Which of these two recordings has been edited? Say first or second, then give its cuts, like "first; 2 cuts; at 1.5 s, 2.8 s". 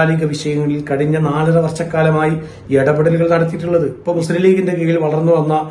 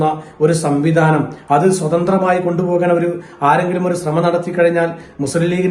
first; 1 cut; at 4.0 s